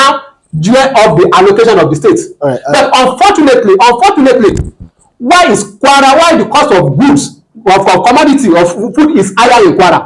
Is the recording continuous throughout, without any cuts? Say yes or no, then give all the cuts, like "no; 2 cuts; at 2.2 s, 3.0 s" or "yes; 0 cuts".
yes; 0 cuts